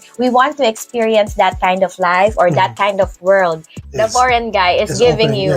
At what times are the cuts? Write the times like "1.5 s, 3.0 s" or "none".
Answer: 3.7 s